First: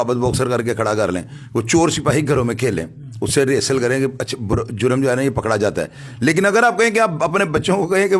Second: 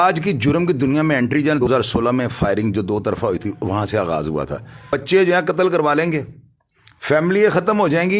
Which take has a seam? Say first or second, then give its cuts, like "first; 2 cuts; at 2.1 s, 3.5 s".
second; 2 cuts; at 1.6 s, 4.9 s